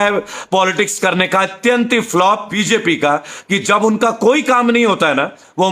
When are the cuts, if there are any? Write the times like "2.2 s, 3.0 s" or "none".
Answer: 2.5 s